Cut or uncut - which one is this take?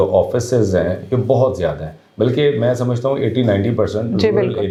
uncut